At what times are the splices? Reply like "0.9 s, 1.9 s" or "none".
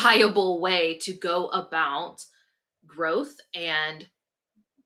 none